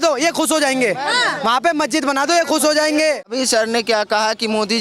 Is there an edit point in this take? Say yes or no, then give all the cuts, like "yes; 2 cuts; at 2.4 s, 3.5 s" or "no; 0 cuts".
yes; 1 cut; at 3.3 s